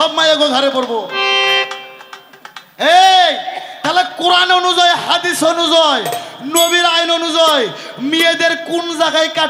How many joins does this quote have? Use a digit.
0